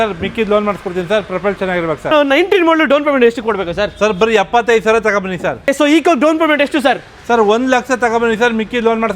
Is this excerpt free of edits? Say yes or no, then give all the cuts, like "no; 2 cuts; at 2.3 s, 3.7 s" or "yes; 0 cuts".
no; 2 cuts; at 2.1 s, 5.7 s